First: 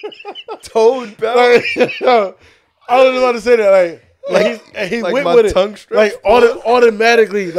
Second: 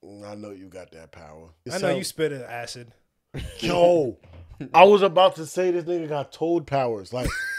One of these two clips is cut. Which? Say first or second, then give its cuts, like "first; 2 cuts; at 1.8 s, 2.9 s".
second; 1 cut; at 1.6 s